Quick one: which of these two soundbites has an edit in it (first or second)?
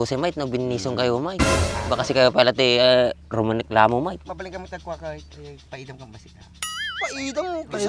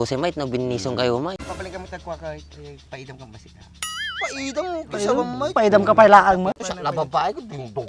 second